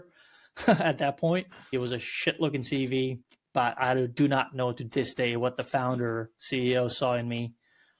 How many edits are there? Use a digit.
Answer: 1